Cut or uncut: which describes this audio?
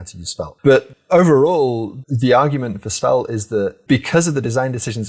cut